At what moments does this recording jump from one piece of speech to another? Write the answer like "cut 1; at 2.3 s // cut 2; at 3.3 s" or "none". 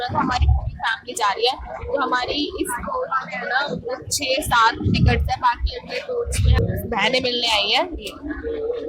cut 1; at 6.6 s